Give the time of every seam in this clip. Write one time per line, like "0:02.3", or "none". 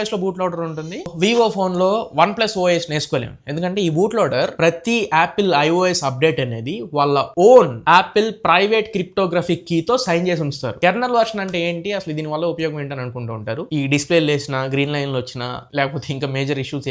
0:01.1
0:04.5
0:10.7
0:13.6